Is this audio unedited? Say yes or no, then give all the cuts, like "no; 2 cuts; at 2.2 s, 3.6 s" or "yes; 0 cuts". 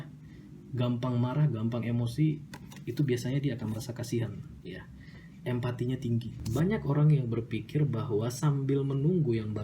no; 1 cut; at 6.4 s